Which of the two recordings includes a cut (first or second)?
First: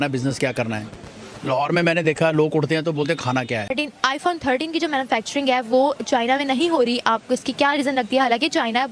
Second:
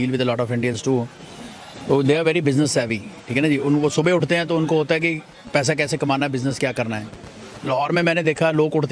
first